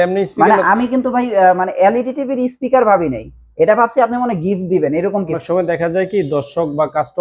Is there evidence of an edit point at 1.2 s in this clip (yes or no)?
no